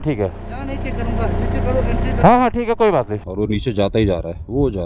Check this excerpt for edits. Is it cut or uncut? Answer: cut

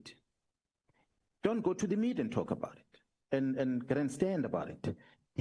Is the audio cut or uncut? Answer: uncut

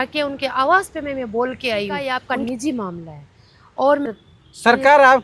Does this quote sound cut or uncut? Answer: cut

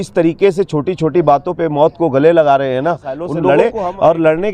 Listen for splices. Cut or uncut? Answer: cut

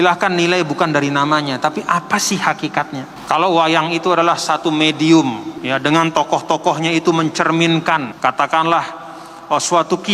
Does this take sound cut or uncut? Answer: cut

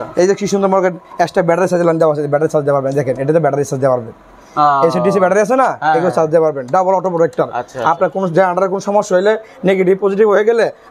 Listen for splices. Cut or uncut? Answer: uncut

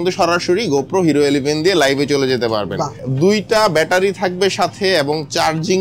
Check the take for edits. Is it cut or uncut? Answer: cut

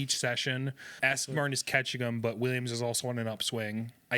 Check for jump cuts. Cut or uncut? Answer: cut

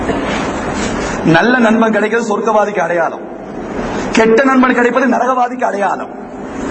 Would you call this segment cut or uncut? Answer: uncut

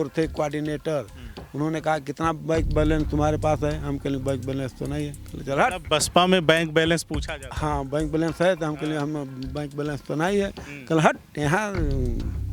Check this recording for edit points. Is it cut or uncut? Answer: uncut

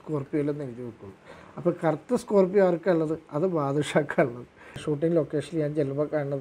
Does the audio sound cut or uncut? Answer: cut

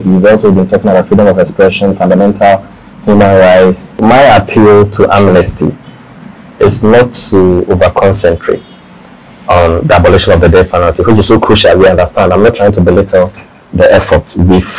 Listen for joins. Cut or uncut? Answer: cut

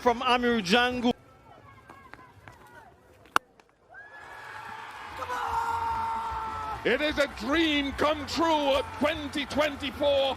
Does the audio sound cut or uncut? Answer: cut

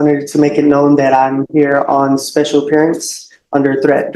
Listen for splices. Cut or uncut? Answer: uncut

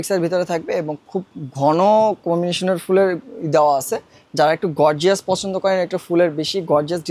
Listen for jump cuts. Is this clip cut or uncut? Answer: uncut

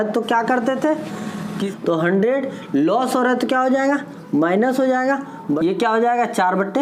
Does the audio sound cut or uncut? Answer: cut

